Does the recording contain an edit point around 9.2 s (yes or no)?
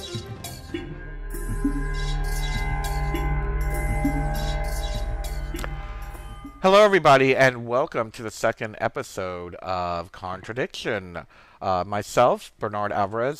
yes